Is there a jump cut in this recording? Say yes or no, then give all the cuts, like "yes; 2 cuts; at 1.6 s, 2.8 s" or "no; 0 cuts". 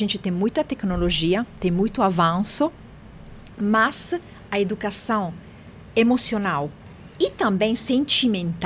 no; 0 cuts